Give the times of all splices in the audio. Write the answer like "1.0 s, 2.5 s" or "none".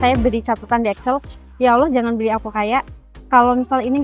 none